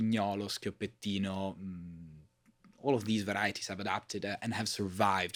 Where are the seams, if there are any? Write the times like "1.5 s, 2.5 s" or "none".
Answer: none